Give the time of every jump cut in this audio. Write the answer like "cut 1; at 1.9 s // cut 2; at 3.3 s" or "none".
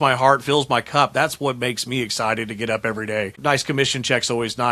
cut 1; at 3.3 s